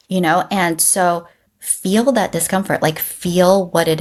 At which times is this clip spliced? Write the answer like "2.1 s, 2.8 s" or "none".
none